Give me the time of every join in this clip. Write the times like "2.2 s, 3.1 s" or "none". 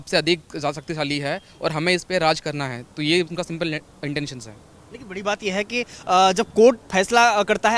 none